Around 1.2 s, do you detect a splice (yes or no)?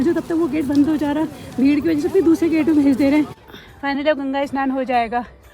no